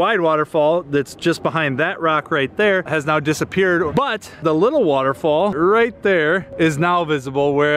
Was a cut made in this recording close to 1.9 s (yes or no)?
no